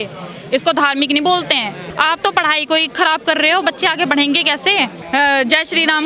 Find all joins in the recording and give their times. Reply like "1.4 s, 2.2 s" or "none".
1.8 s, 5.0 s